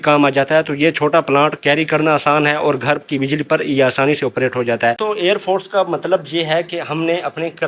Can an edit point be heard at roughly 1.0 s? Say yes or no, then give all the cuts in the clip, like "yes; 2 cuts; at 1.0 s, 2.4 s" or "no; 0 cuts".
no; 1 cut; at 5.0 s